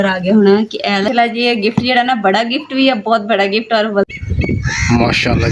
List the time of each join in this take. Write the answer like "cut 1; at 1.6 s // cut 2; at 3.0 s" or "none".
cut 1; at 1.1 s // cut 2; at 4.1 s